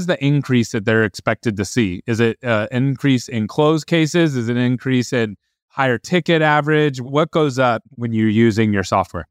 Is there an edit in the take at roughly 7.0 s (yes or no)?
yes